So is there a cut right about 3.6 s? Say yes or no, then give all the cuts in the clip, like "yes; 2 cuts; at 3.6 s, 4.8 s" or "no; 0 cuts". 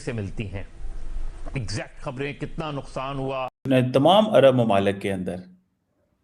yes; 1 cut; at 3.6 s